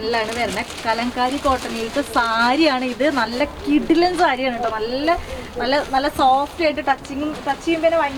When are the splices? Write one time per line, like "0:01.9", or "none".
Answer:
none